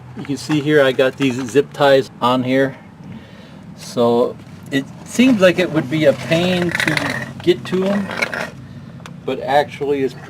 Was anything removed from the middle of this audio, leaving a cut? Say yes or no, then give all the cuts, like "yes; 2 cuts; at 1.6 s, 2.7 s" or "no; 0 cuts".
yes; 1 cut; at 2.1 s